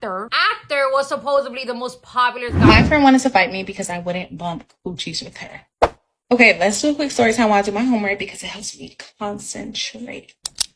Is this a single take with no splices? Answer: no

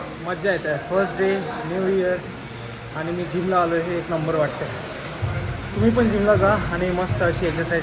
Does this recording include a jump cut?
no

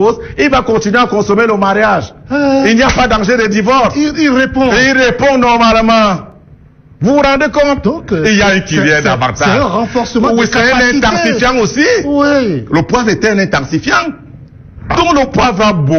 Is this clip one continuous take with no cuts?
yes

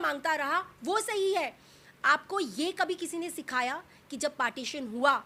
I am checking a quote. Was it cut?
no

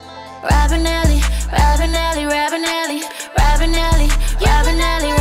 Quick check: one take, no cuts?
yes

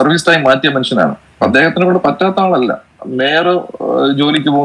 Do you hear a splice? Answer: yes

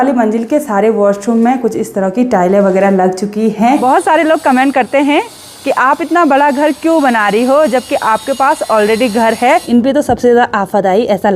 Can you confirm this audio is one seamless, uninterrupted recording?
no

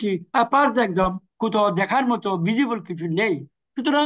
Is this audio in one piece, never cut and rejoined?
no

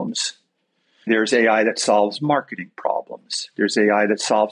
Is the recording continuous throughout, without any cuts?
no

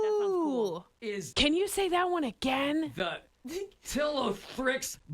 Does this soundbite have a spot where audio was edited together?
yes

